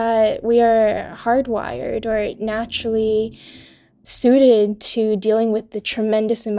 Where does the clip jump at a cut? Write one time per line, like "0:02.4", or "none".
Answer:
0:04.1